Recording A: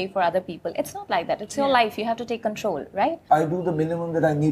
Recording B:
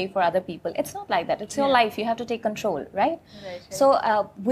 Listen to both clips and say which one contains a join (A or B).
A